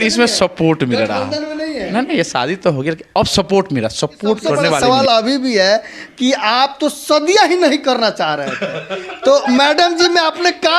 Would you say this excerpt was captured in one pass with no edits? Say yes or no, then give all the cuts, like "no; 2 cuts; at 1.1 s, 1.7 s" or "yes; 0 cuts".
no; 1 cut; at 4.7 s